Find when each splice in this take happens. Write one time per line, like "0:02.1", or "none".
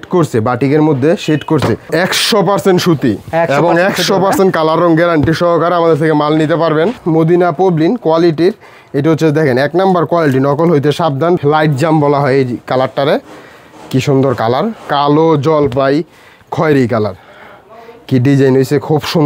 0:01.8
0:07.0
0:11.4
0:14.8